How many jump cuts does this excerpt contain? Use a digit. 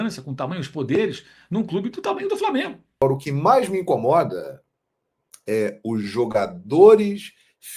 1